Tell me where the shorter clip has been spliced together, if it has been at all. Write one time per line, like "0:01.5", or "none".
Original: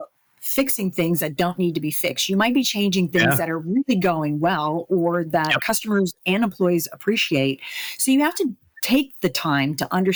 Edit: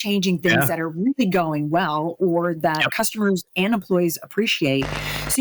none

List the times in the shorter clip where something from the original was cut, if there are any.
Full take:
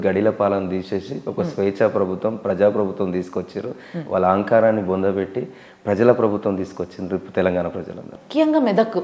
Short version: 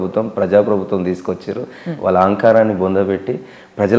none

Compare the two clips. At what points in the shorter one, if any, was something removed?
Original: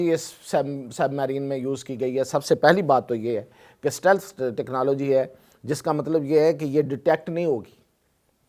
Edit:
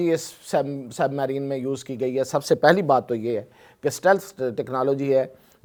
none

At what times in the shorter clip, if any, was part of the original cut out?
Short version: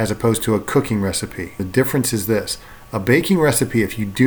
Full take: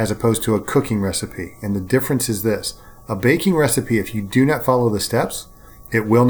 0:01.6

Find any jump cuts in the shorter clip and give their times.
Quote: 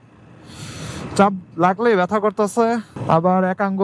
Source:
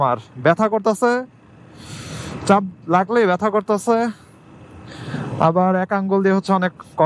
0:02.9

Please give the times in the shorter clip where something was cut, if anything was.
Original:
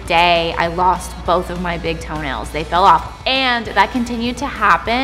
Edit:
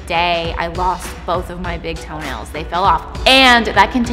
none

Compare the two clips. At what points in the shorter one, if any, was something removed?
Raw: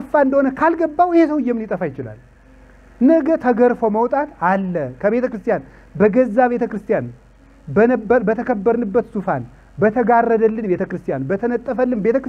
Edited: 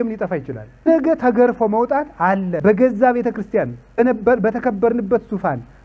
0:00.9
0:02.5
0:04.0

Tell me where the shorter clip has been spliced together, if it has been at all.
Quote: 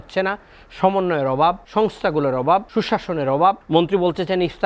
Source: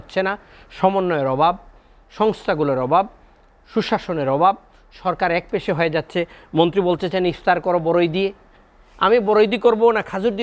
0:01.6
0:02.7
0:03.6

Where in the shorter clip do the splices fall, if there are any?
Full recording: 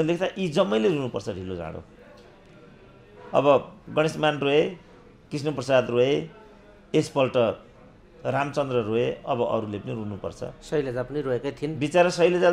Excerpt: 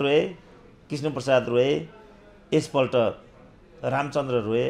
none

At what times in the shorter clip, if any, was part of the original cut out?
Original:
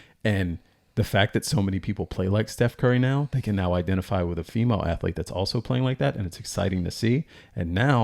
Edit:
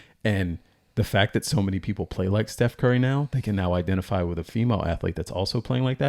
none

